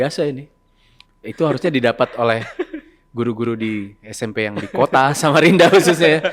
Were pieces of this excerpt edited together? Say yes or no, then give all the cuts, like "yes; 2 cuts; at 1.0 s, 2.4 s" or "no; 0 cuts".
no; 0 cuts